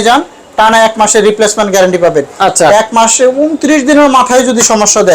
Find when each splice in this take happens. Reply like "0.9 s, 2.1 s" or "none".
none